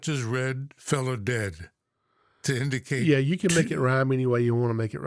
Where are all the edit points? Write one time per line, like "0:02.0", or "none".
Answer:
none